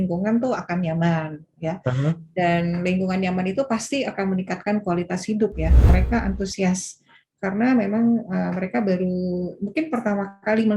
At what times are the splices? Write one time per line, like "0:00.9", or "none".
0:05.9